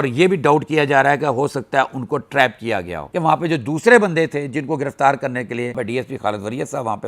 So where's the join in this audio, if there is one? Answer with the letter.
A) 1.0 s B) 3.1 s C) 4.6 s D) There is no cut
B